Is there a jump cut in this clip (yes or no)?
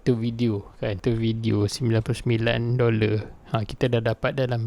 yes